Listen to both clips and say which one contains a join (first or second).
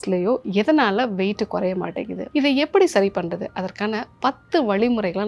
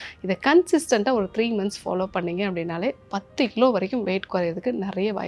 first